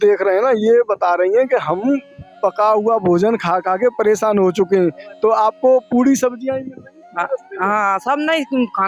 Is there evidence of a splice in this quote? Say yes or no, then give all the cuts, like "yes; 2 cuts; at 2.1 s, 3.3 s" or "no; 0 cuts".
no; 0 cuts